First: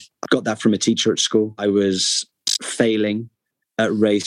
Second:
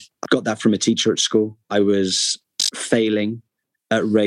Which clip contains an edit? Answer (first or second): first